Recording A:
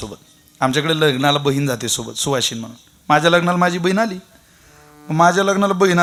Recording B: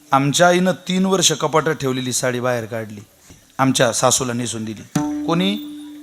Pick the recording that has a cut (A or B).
B